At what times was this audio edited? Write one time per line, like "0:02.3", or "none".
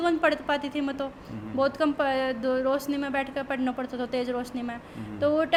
none